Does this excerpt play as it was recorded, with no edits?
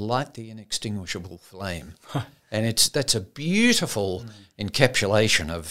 yes; 0 cuts

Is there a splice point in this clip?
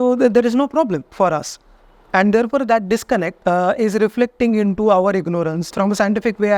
yes; 3 cuts; at 1.1 s, 3.3 s, 5.6 s

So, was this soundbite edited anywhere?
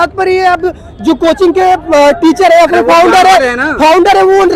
no; 0 cuts

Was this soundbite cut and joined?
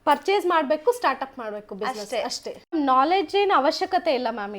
yes; 1 cut; at 2.7 s

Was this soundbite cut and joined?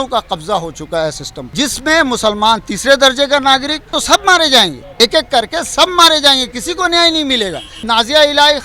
yes; 4 cuts; at 1.3 s, 3.9 s, 4.8 s, 7.7 s

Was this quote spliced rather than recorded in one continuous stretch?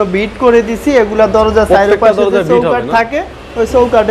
no; 0 cuts

